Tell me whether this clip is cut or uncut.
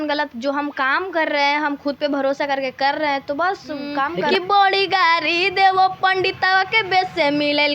cut